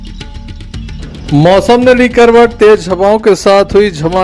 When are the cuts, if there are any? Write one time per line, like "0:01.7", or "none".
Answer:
none